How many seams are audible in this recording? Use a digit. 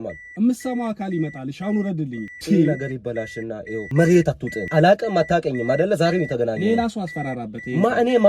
3